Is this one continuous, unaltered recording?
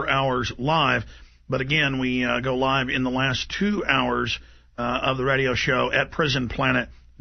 no; 1 cut; at 1.6 s

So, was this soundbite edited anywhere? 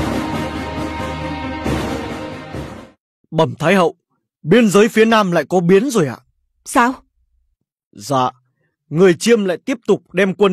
no; 0 cuts

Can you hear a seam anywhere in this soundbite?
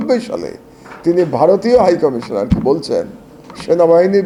no; 0 cuts

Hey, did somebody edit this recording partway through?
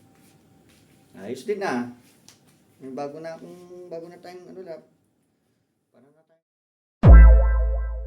yes; 1 cut; at 6.9 s

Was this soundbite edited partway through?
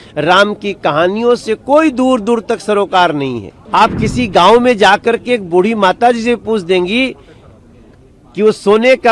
yes; 1 cut; at 3.5 s

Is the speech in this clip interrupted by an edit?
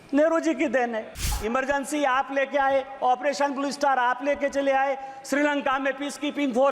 yes; 1 cut; at 1.4 s

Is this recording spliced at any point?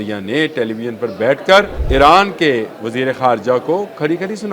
yes; 1 cut; at 1.8 s

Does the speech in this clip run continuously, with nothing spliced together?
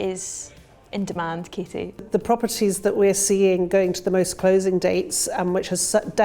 no; 1 cut; at 2.0 s

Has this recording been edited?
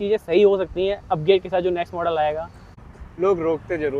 yes; 1 cut; at 2.8 s

